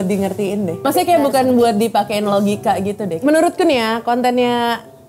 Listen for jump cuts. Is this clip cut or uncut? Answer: cut